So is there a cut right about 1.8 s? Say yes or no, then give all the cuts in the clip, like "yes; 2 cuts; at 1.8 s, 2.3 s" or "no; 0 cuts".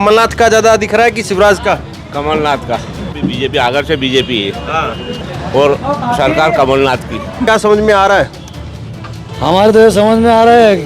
no; 3 cuts; at 3.1 s, 5.2 s, 7.5 s